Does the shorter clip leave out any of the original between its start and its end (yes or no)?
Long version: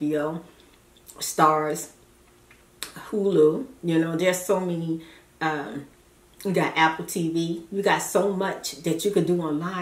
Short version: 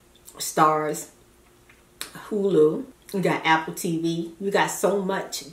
yes